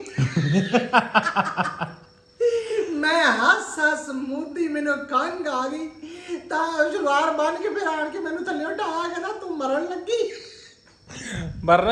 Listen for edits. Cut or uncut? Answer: uncut